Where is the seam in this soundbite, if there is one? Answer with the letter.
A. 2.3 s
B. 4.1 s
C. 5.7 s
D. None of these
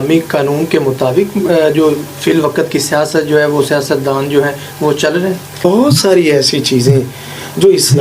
C